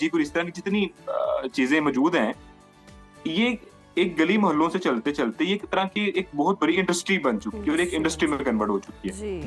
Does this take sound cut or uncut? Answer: uncut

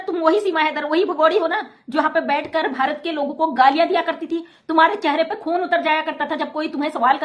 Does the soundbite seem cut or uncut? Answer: uncut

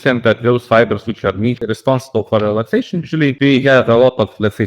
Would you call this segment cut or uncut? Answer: cut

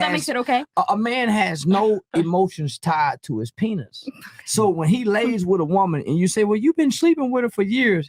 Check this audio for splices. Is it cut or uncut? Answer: uncut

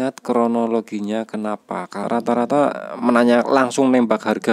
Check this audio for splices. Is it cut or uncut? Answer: cut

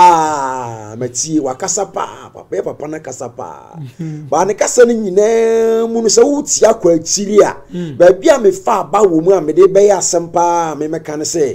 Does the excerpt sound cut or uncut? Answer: uncut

